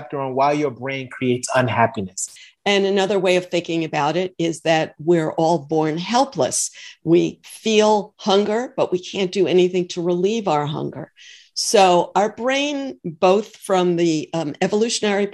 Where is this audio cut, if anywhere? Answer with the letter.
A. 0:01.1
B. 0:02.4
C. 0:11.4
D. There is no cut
B